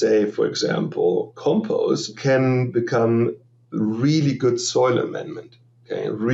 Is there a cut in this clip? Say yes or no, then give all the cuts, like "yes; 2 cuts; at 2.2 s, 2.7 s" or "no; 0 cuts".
yes; 1 cut; at 2.2 s